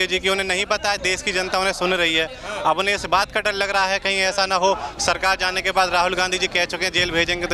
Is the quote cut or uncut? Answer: uncut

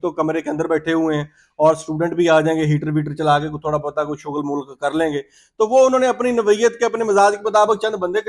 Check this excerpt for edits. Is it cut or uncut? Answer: uncut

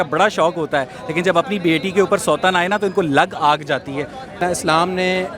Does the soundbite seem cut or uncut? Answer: uncut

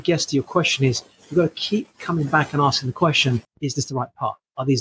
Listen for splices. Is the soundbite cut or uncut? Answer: cut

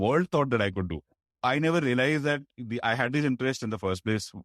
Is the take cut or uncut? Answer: cut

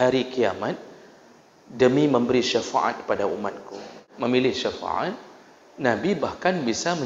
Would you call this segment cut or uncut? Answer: cut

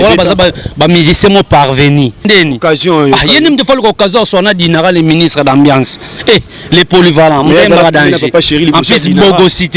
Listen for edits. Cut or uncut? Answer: cut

